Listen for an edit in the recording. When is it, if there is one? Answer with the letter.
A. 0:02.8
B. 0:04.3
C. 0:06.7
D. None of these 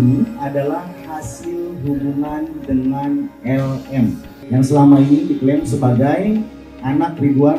B